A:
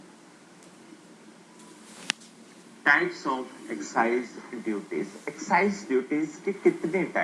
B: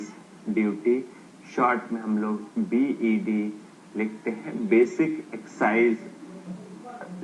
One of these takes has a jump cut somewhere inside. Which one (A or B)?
B